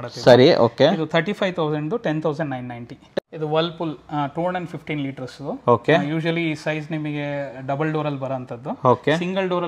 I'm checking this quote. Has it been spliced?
yes; 1 cut; at 3.2 s

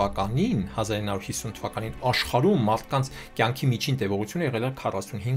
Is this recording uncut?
yes; 0 cuts

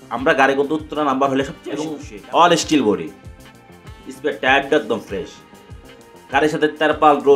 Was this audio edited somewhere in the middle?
yes; 1 cut; at 1.6 s

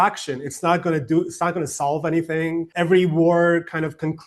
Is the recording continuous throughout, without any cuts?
no; 1 cut; at 2.7 s

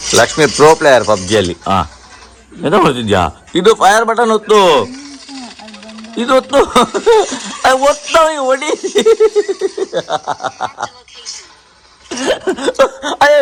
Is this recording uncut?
yes; 0 cuts

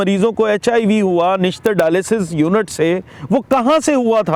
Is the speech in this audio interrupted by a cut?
no; 0 cuts

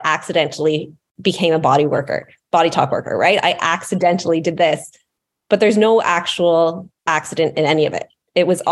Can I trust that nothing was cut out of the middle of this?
no; 1 cut; at 1.0 s

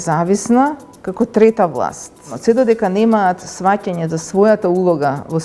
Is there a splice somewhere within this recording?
yes; 1 cut; at 2.3 s

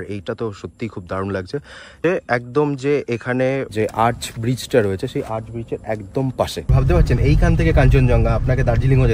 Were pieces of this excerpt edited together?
yes; 3 cuts; at 2.0 s, 3.7 s, 6.7 s

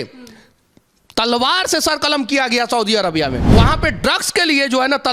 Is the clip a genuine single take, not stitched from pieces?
no; 1 cut; at 3.5 s

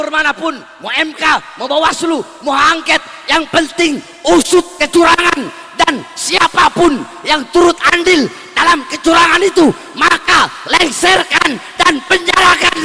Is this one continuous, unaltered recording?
yes; 0 cuts

